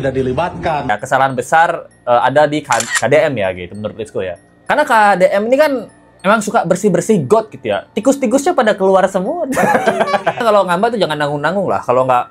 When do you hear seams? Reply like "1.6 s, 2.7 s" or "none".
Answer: 0.9 s, 10.4 s